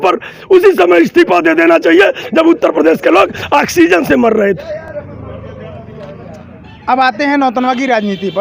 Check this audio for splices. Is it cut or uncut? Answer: uncut